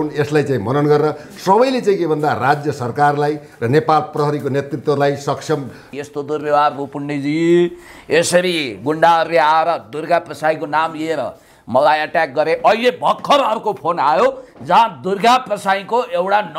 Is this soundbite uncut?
no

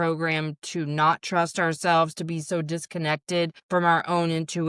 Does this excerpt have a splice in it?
yes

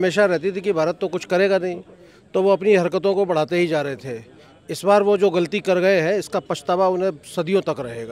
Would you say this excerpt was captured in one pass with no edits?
yes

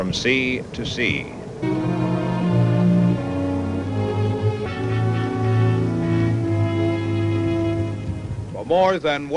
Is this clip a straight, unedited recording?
yes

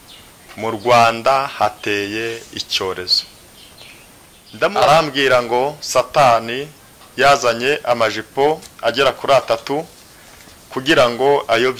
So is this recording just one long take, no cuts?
no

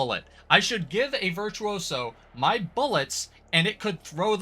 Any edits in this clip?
no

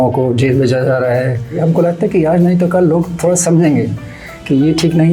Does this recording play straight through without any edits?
no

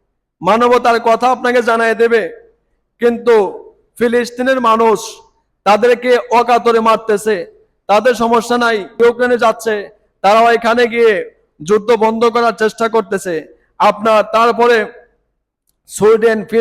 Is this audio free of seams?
no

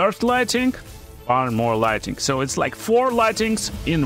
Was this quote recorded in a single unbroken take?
no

